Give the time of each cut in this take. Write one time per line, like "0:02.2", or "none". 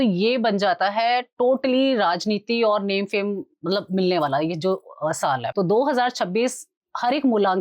0:05.5